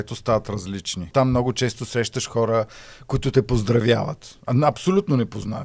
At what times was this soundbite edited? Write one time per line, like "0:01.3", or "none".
0:01.1